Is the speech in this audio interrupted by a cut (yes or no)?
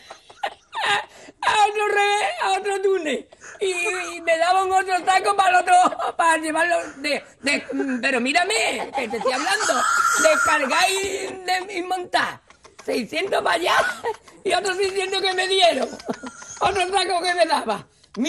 no